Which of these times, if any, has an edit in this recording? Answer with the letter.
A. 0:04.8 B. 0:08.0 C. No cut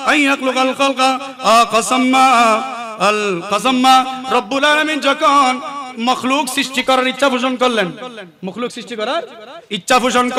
C